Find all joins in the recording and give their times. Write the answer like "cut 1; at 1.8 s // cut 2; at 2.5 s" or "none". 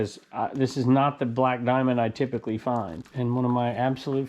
cut 1; at 3.0 s

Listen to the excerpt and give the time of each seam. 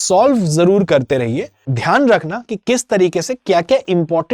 cut 1; at 1.7 s

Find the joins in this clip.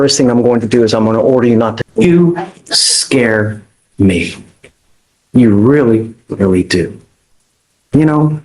cut 1; at 1.8 s

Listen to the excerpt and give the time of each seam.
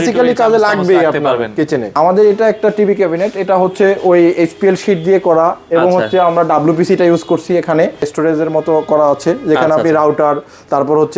cut 1; at 1.9 s // cut 2; at 8.1 s

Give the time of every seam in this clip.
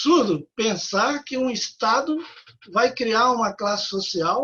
none

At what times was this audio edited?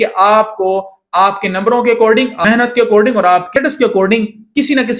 cut 1; at 2.4 s // cut 2; at 3.5 s

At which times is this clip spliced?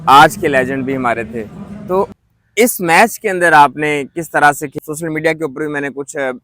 cut 1; at 4.8 s

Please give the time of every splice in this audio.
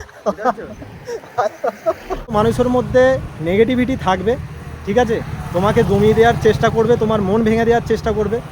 cut 1; at 2.1 s

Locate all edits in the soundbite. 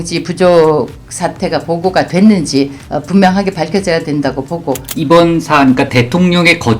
cut 1; at 2.8 s // cut 2; at 4.9 s

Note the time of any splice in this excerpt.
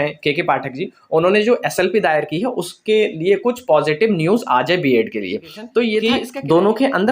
cut 1; at 6.0 s

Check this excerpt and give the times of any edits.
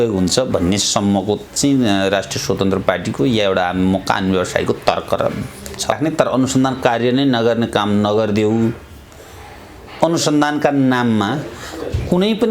cut 1; at 6.0 s

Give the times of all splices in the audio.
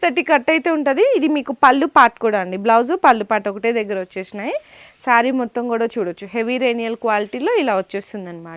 none

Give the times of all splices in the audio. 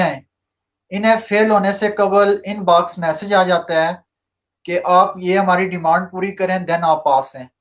none

